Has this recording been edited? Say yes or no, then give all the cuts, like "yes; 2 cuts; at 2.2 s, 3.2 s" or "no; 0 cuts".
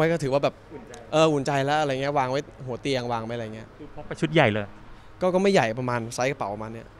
no; 0 cuts